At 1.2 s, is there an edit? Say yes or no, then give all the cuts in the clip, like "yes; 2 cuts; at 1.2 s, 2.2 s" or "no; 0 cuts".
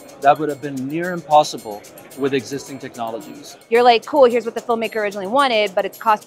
no; 1 cut; at 3.5 s